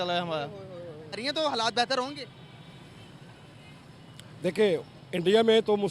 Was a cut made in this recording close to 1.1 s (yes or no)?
yes